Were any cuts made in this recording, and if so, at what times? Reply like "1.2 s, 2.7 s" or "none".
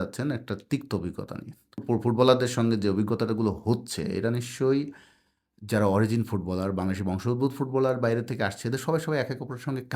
1.8 s